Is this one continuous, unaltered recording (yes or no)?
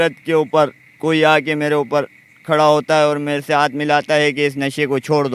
yes